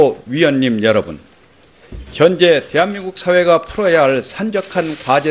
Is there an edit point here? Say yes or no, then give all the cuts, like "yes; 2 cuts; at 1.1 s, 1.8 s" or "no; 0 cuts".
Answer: yes; 1 cut; at 1.2 s